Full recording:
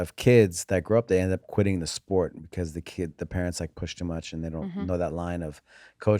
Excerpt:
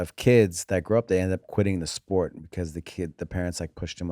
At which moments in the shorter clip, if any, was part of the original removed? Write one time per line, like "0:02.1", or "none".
none